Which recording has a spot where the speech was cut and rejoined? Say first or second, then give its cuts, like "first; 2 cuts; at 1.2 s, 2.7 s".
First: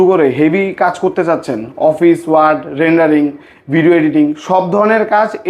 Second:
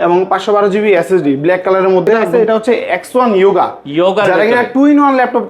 second; 1 cut; at 2.3 s